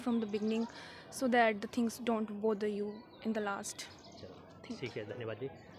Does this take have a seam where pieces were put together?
no; 0 cuts

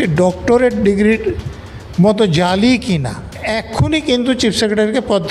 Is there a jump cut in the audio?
yes; 1 cut; at 3.5 s

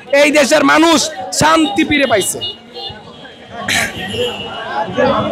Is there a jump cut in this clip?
no; 0 cuts

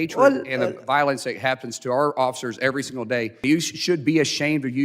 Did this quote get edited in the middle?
yes; 1 cut; at 3.4 s

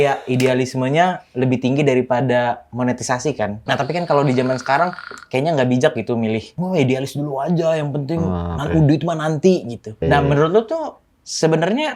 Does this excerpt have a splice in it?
yes; 3 cuts; at 3.6 s, 6.5 s, 10.0 s

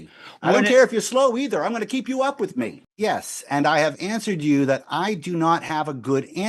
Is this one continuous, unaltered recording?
no; 1 cut; at 2.8 s

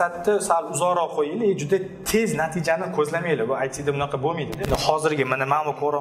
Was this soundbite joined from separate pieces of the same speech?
yes; 1 cut; at 4.7 s

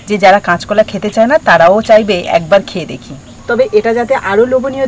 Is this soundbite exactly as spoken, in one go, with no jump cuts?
yes; 0 cuts

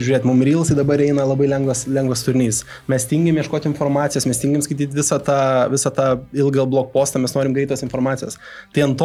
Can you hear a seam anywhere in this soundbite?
no; 0 cuts

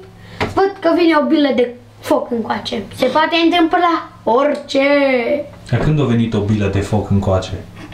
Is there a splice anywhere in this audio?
no; 0 cuts

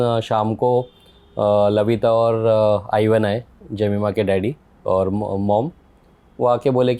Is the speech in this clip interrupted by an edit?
no; 0 cuts

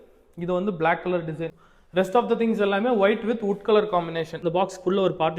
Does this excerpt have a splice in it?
yes; 2 cuts; at 1.5 s, 4.3 s

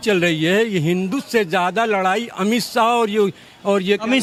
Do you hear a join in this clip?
no; 0 cuts

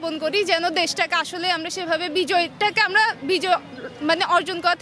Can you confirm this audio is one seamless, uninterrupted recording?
yes; 0 cuts

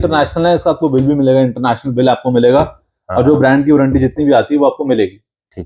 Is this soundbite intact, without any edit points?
yes; 0 cuts

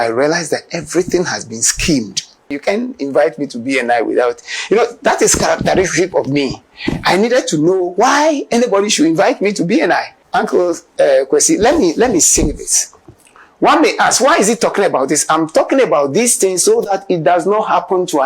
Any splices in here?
yes; 2 cuts; at 2.6 s, 10.2 s

